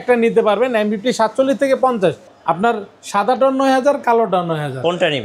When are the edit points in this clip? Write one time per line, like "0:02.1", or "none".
0:02.3